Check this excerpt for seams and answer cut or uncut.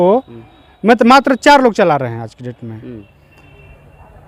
uncut